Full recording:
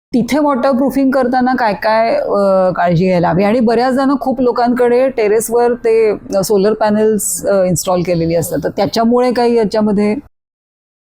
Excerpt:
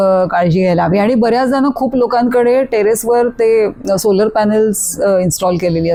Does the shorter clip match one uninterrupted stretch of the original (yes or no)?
yes